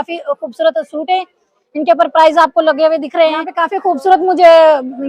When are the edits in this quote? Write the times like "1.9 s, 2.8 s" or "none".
3.6 s